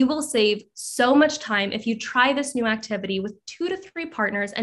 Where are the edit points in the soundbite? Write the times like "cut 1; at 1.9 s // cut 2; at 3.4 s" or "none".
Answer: none